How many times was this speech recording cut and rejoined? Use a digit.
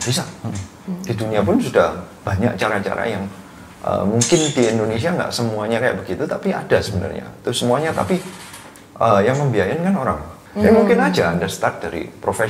1